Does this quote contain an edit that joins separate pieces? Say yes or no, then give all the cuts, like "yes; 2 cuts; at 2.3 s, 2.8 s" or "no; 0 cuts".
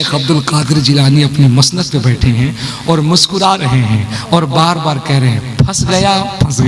no; 0 cuts